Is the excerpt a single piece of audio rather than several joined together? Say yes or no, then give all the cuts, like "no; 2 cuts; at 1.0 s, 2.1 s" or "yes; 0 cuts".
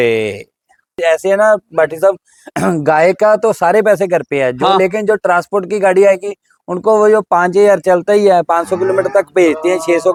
yes; 0 cuts